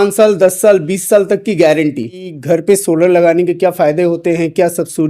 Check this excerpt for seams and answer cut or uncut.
cut